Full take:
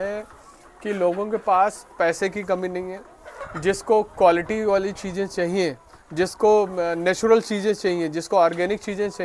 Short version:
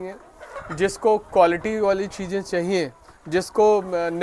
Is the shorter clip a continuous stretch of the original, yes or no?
yes